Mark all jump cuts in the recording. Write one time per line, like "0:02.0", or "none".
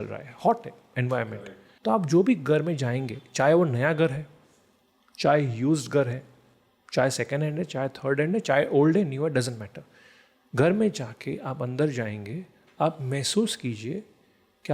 0:01.3